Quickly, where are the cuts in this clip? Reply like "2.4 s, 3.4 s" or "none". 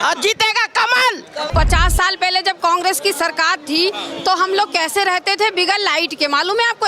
1.5 s